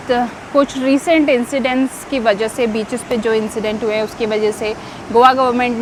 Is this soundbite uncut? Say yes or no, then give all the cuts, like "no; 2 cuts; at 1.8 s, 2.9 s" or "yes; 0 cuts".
yes; 0 cuts